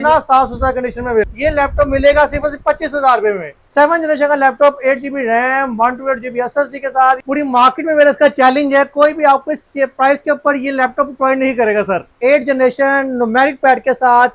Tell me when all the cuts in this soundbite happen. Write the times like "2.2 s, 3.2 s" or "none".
1.3 s, 3.6 s, 7.2 s, 12.1 s